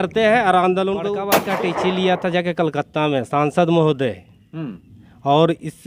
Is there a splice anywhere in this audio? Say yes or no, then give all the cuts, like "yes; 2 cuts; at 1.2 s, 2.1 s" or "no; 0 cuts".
yes; 1 cut; at 1.4 s